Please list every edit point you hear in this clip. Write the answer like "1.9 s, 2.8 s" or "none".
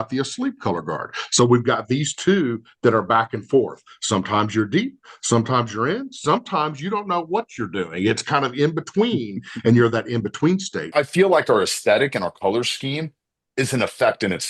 10.9 s